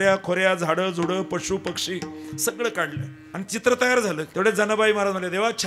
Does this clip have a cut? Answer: yes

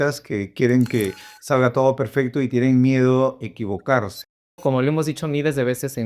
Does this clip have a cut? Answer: yes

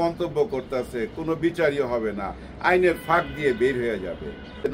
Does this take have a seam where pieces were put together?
no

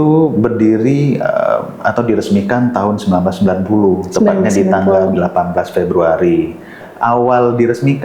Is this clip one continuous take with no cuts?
no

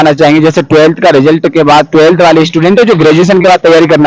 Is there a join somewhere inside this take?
no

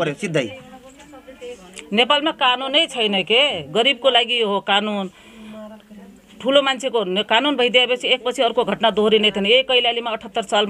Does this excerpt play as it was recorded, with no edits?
yes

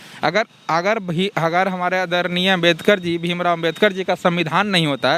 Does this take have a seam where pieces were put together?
no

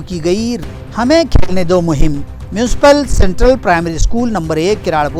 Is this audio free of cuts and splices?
yes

